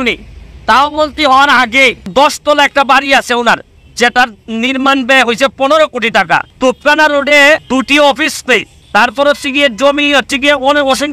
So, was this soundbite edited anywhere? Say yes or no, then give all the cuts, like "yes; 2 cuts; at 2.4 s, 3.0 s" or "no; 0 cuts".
yes; 4 cuts; at 2.1 s, 6.5 s, 7.6 s, 8.8 s